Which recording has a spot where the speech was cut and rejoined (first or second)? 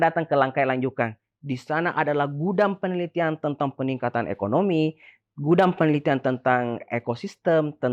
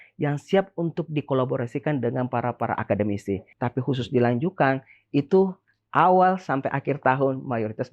second